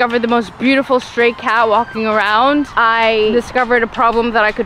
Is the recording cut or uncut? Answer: cut